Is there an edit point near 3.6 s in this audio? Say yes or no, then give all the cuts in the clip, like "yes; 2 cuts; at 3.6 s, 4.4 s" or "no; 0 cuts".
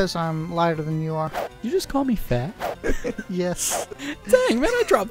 no; 1 cut; at 1.4 s